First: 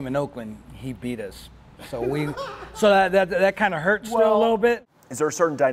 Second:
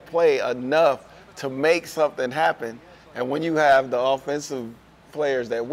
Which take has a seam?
first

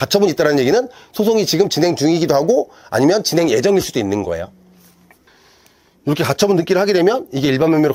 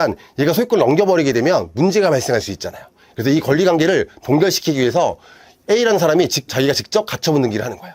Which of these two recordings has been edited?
second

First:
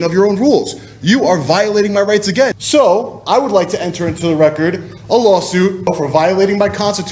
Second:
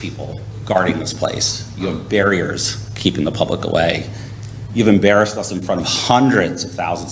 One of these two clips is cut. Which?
first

